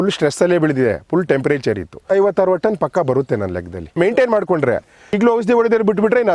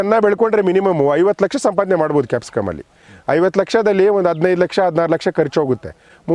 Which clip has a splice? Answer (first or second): first